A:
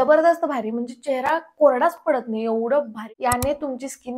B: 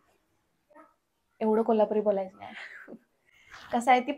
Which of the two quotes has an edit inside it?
A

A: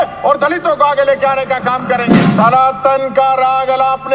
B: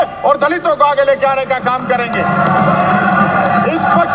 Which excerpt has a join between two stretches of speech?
A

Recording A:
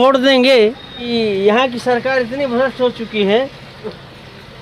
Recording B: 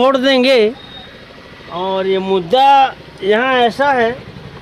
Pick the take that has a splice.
A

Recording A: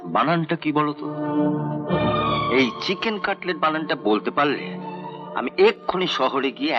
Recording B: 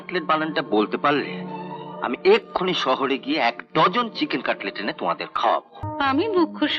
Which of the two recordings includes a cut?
B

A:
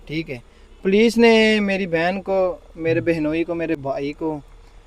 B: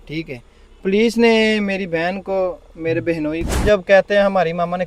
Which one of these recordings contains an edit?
B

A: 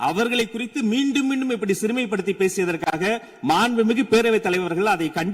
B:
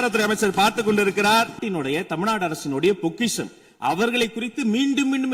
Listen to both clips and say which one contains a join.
B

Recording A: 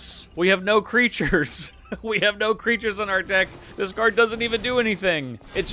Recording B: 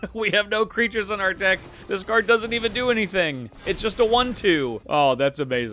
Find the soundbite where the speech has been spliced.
B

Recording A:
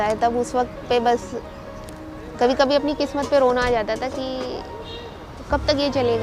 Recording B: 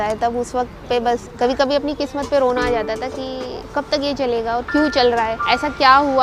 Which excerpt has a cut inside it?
B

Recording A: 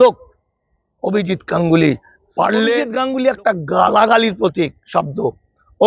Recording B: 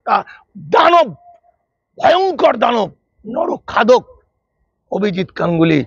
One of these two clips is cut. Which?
A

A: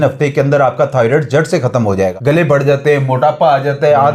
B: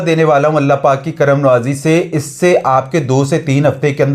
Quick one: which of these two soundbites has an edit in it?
A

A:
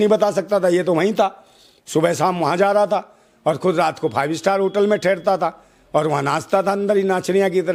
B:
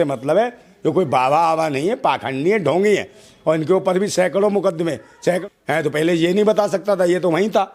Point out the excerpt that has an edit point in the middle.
B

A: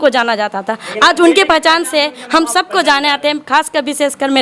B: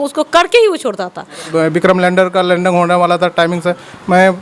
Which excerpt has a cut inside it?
B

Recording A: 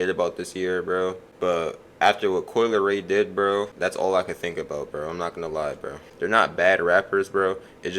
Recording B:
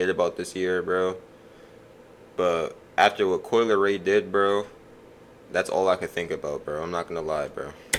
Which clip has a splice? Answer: A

